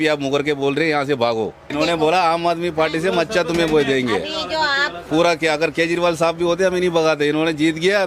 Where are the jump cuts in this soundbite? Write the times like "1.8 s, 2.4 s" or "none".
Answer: 1.7 s